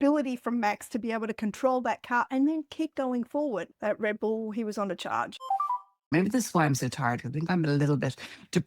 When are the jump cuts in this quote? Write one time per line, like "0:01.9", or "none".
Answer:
0:03.7
0:05.8